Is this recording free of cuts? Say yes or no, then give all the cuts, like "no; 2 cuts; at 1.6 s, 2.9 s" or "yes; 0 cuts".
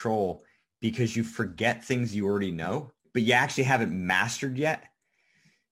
no; 1 cut; at 3.0 s